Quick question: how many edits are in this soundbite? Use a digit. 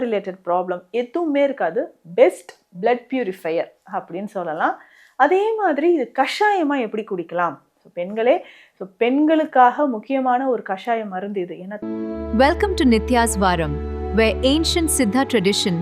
1